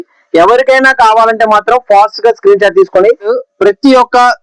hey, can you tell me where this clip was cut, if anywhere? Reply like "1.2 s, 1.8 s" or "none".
3.3 s